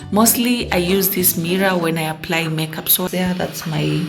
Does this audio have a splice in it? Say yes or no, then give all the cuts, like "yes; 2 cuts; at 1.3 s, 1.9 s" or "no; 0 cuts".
yes; 1 cut; at 3.1 s